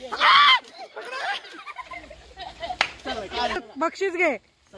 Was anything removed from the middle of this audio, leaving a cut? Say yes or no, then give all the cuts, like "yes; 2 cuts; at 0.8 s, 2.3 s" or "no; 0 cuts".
yes; 1 cut; at 3.6 s